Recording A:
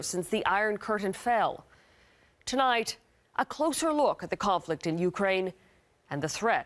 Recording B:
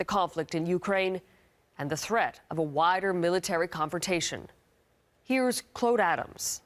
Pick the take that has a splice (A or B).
B